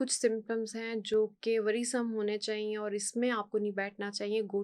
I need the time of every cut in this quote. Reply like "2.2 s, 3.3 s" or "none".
none